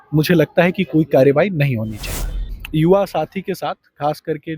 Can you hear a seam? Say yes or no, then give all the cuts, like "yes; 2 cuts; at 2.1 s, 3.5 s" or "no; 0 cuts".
yes; 1 cut; at 2.5 s